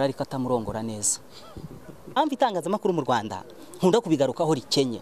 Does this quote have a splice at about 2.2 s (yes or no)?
yes